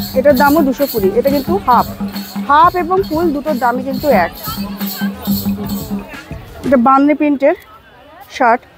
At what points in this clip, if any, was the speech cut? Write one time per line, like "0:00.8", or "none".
none